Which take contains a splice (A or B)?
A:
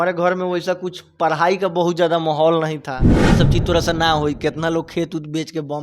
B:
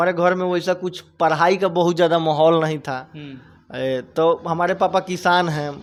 A